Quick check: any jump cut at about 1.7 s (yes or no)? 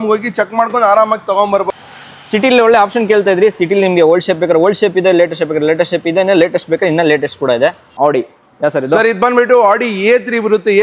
yes